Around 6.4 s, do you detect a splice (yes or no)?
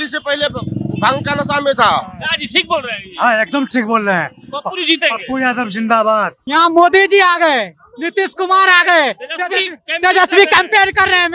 yes